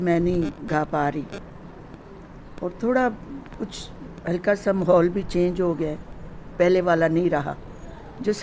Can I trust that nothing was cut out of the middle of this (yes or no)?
yes